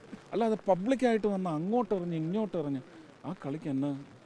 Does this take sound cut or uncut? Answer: uncut